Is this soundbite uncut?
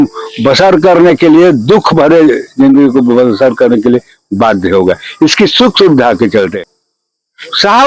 no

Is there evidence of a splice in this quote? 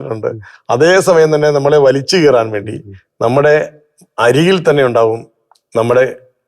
no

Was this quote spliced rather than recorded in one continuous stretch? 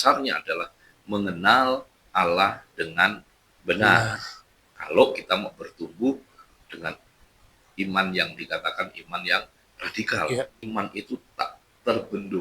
yes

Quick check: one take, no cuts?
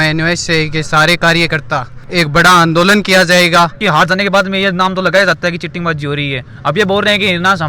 no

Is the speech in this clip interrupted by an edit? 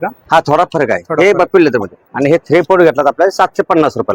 no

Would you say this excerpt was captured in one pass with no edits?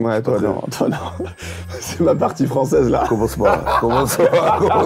yes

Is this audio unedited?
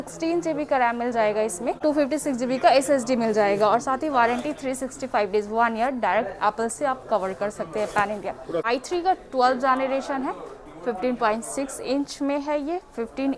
no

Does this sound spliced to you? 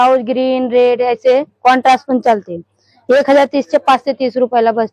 no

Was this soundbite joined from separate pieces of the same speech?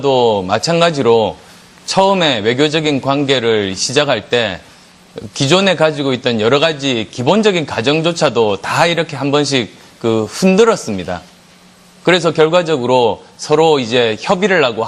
no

